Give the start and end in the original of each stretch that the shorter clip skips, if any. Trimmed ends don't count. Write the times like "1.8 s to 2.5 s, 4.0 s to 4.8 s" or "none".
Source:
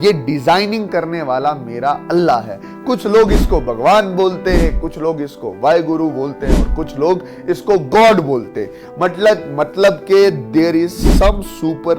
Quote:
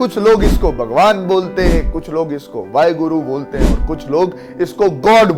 none